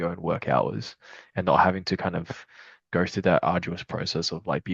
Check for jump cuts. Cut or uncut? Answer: uncut